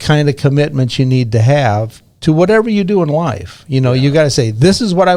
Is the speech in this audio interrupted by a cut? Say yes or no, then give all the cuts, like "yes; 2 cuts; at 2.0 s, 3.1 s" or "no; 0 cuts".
no; 0 cuts